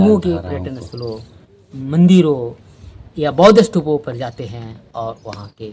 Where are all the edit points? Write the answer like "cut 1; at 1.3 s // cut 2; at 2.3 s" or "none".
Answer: none